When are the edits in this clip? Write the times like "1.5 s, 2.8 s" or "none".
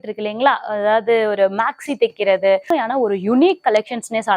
2.7 s